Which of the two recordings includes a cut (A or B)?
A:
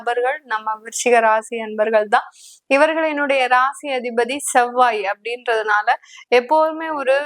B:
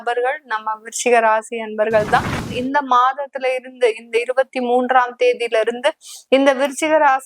B